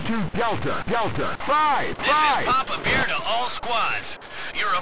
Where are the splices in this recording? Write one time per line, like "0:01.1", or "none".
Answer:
0:02.4